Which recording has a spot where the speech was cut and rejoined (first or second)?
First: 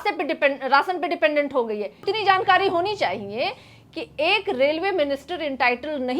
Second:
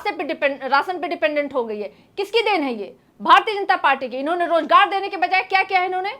first